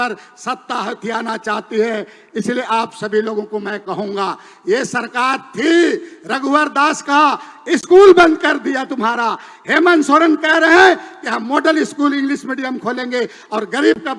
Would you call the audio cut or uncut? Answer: uncut